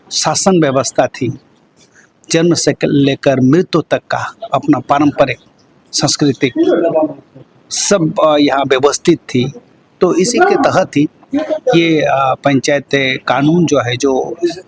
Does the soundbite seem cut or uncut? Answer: uncut